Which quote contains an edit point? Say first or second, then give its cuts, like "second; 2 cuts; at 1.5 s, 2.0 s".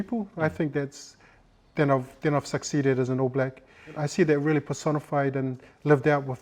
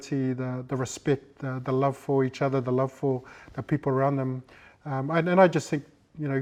first; 1 cut; at 4.0 s